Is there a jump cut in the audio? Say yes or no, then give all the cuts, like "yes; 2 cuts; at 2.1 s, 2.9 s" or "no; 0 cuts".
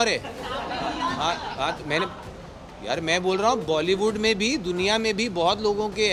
no; 0 cuts